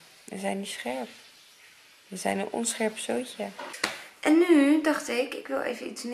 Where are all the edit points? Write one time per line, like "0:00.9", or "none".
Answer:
0:03.7